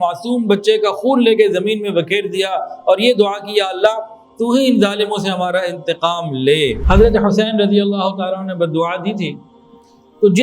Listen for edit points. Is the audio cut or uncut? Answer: cut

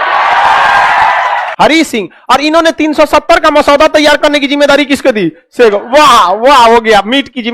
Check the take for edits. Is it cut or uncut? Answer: cut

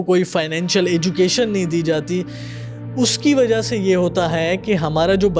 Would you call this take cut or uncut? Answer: uncut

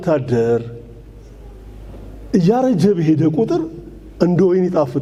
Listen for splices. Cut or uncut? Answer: uncut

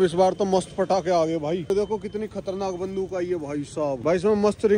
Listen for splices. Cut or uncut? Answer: uncut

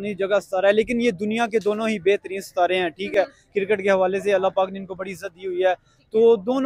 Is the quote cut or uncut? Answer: uncut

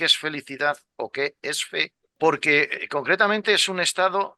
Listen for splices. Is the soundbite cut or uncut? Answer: cut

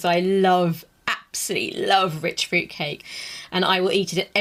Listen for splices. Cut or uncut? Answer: uncut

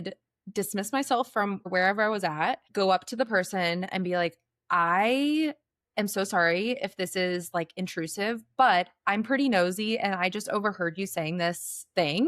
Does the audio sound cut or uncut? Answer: cut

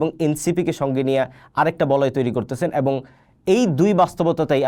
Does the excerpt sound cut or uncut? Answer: uncut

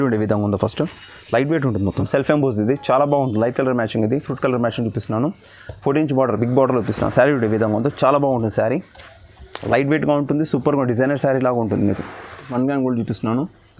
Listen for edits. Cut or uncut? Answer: cut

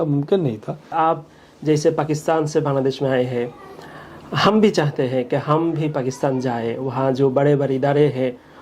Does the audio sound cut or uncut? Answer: cut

